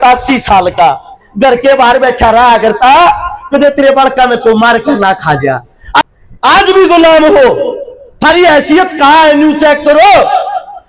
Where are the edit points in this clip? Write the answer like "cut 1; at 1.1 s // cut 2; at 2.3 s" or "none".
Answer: cut 1; at 6.0 s